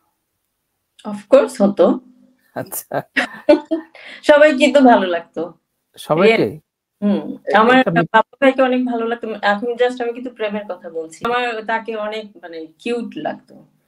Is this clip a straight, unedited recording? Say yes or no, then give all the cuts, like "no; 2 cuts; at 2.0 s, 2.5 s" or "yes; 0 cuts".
no; 1 cut; at 11.2 s